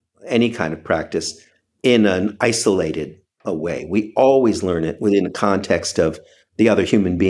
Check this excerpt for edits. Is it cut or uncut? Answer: uncut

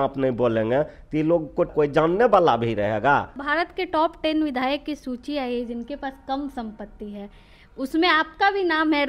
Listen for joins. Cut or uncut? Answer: cut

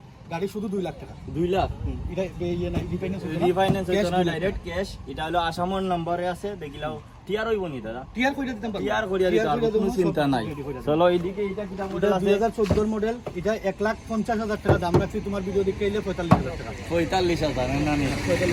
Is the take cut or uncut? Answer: uncut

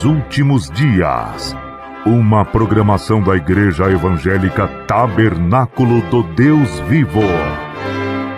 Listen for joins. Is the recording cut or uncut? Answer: cut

